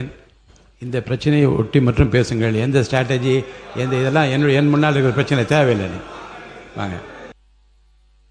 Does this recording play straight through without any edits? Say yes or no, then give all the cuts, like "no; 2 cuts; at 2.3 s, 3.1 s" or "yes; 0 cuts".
no; 1 cut; at 7.3 s